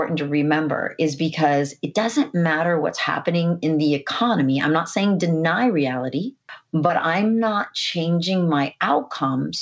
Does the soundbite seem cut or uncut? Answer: cut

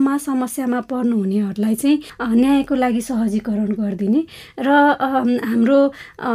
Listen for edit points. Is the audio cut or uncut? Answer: uncut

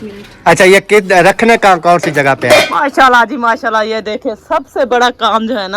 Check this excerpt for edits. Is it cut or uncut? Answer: cut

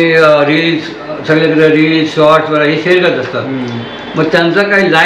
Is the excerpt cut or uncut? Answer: uncut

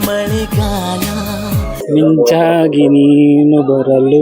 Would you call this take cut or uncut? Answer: cut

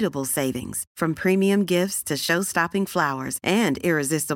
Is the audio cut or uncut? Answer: uncut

